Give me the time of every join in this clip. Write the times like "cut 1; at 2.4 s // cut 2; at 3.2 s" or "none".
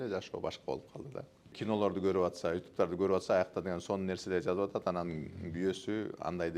cut 1; at 1.5 s